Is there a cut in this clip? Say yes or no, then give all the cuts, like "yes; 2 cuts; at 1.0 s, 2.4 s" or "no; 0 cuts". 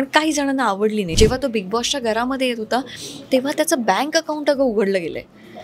yes; 1 cut; at 1.1 s